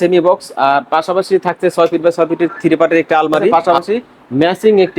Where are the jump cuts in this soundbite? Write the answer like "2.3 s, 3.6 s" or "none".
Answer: 3.6 s